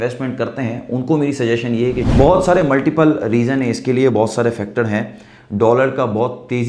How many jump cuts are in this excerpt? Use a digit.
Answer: 1